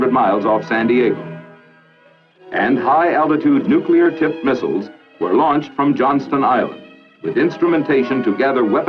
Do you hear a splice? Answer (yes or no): yes